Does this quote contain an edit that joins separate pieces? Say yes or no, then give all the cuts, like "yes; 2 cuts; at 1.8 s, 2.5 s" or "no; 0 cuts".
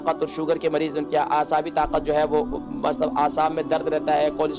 no; 0 cuts